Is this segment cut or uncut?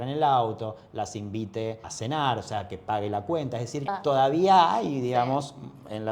cut